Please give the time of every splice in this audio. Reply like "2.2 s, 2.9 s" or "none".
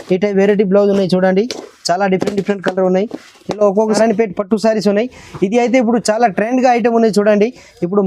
4.0 s